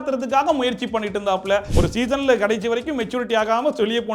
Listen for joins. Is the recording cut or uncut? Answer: cut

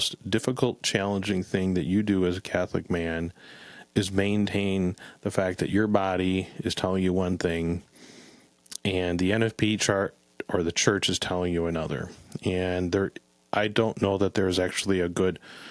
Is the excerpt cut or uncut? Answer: uncut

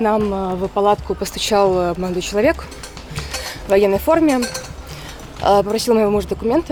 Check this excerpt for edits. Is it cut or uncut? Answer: uncut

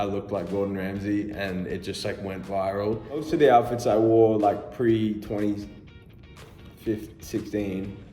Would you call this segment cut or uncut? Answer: cut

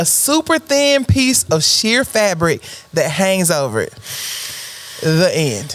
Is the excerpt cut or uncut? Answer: uncut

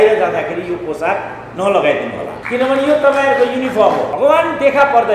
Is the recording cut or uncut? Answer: cut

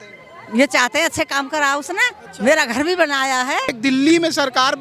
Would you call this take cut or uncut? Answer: cut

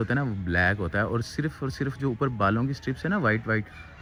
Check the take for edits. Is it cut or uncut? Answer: uncut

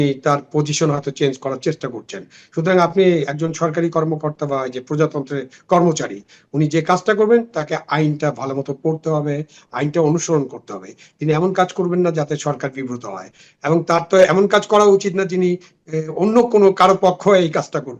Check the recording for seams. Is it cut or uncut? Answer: uncut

